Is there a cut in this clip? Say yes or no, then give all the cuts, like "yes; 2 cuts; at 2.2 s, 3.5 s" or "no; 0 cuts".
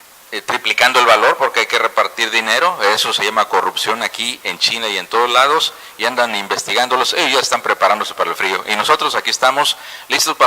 yes; 1 cut; at 2.3 s